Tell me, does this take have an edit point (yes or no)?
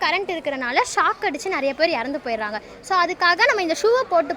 no